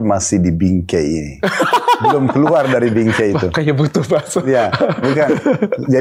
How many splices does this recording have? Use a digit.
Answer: 0